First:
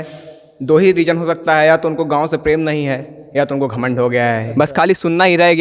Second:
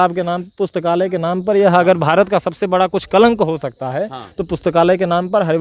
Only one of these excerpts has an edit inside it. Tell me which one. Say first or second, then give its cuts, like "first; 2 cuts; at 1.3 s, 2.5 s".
first; 1 cut; at 4.4 s